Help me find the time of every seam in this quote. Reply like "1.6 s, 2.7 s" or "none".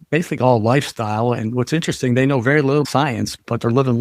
2.9 s